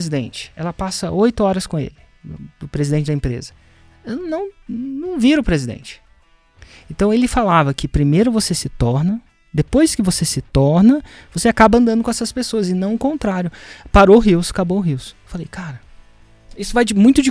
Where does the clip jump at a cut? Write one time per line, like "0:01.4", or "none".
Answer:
none

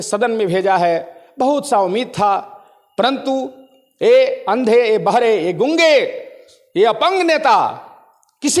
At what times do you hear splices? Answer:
none

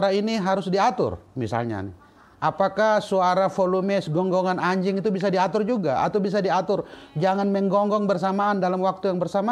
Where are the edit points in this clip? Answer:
none

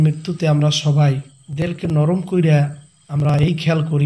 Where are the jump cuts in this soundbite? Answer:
0:01.8
0:02.9

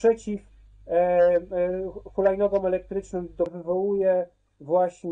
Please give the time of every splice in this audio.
0:03.5

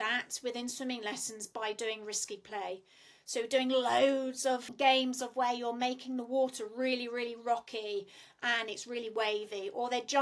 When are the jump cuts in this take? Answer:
0:04.7

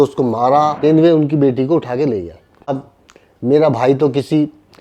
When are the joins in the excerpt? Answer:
0:00.8
0:02.7

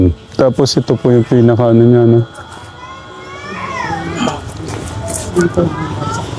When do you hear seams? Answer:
none

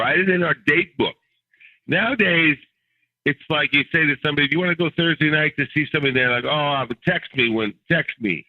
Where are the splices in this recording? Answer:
0:01.6

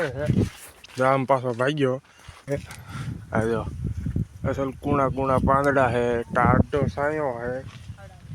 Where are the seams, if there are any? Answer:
0:02.5

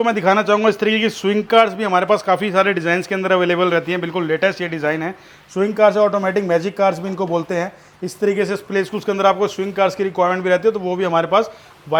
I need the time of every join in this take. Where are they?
none

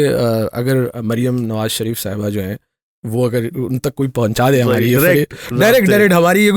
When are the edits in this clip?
none

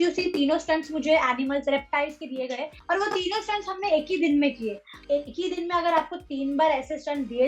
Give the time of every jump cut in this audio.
0:02.7
0:04.9

